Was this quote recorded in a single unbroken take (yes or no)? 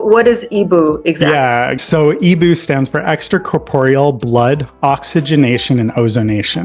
no